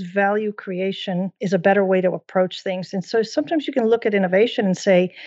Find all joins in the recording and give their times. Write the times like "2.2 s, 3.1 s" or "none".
1.3 s